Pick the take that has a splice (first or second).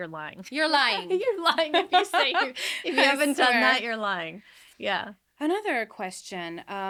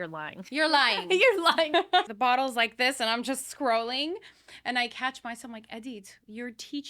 second